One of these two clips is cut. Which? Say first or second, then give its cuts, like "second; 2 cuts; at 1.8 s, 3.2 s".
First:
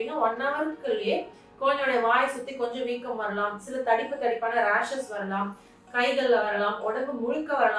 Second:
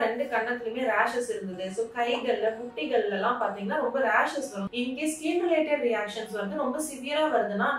second; 1 cut; at 4.7 s